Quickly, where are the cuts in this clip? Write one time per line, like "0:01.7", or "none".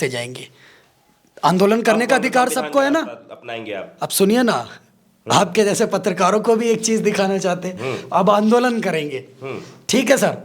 none